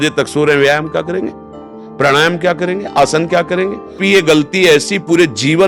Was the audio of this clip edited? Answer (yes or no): yes